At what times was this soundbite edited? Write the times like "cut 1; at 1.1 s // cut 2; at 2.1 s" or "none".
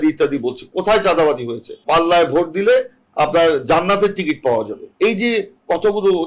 cut 1; at 1.7 s // cut 2; at 4.8 s